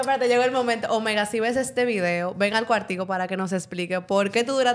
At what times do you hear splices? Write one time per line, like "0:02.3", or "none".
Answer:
none